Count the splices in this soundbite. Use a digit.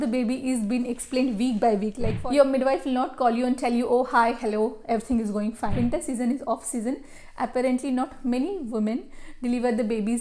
2